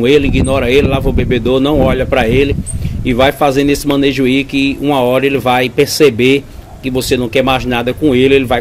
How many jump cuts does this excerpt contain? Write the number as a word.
zero